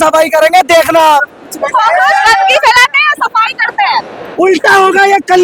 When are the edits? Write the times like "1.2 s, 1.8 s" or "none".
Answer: none